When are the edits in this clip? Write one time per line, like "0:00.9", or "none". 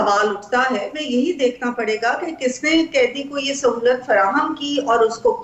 0:00.9